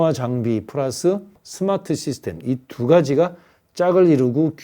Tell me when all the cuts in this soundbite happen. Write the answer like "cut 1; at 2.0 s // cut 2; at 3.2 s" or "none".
cut 1; at 1.4 s